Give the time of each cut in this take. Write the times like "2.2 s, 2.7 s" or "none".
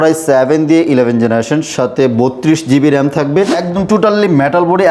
3.6 s